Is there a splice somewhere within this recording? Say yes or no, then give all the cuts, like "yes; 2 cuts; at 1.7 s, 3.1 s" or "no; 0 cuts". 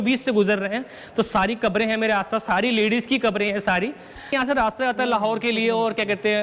yes; 1 cut; at 4.3 s